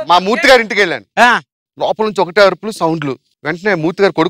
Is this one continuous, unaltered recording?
no; 1 cut; at 1.6 s

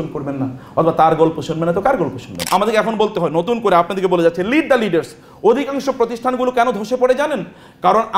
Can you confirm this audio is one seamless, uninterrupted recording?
no; 1 cut; at 2.3 s

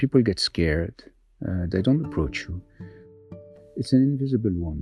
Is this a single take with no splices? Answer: no; 1 cut; at 3.1 s

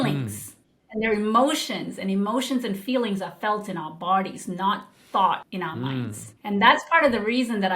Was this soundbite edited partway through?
yes; 1 cut; at 5.5 s

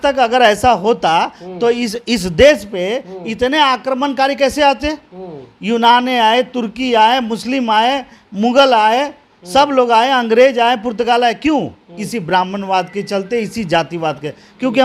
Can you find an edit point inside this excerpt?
no; 0 cuts

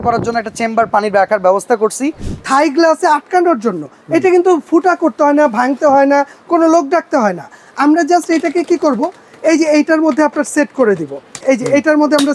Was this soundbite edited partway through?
yes; 2 cuts; at 2.3 s, 11.4 s

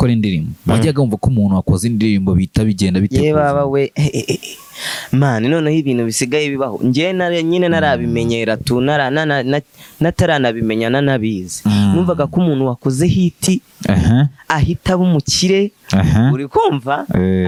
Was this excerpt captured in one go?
yes; 0 cuts

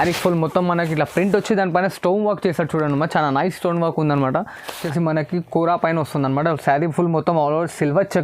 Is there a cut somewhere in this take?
yes; 1 cut; at 4.8 s

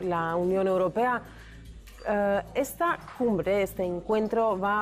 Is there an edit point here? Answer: no; 0 cuts

